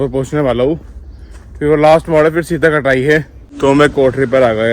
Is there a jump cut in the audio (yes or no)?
yes